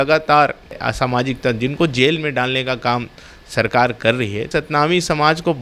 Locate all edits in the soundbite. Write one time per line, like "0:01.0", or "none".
0:00.8
0:04.5